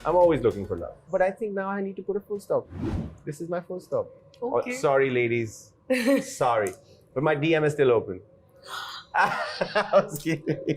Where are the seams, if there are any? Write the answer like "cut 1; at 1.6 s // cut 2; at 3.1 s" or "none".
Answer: cut 1; at 1.1 s // cut 2; at 4.2 s